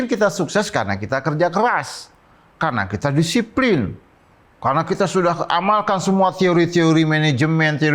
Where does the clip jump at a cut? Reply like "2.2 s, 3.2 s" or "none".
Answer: none